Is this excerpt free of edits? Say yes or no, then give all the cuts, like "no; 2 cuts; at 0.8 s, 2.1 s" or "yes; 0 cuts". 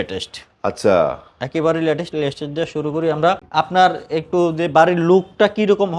no; 1 cut; at 3.5 s